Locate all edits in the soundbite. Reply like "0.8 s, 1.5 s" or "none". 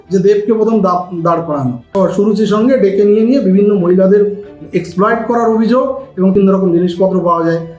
2.1 s, 6.3 s

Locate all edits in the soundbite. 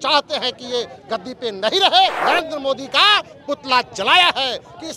2.2 s

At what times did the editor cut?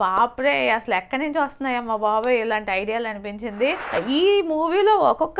3.8 s

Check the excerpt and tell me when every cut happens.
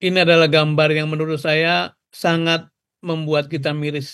2.0 s

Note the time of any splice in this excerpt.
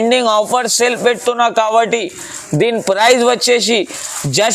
none

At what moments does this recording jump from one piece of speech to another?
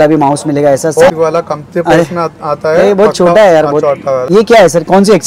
1.1 s, 4.2 s

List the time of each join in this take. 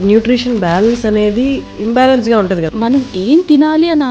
1.7 s, 2.7 s

